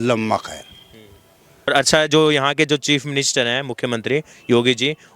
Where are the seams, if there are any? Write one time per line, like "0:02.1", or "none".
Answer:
0:01.7